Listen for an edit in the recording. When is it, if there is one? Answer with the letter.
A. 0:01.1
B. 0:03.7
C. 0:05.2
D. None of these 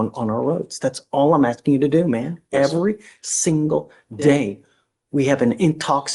D